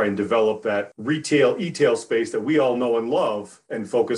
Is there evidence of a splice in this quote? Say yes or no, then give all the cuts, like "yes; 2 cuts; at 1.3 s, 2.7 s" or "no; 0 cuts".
yes; 1 cut; at 0.9 s